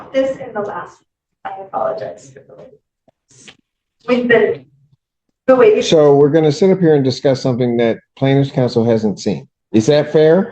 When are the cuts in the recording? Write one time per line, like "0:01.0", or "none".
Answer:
0:09.5